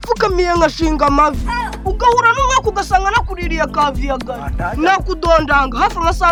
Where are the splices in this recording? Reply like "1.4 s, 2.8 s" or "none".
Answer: none